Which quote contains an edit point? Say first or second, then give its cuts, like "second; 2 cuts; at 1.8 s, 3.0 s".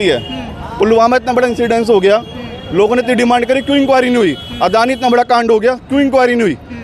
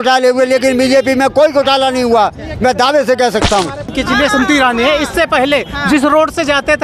second; 1 cut; at 3.9 s